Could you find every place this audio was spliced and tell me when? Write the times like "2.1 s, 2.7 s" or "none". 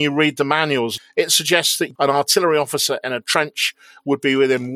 0.9 s, 1.9 s